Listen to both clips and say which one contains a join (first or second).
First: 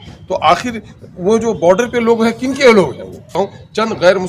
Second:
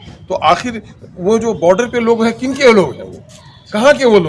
first